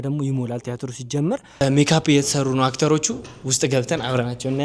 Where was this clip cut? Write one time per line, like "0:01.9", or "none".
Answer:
0:01.6